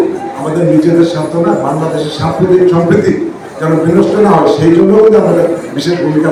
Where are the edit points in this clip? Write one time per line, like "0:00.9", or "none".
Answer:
none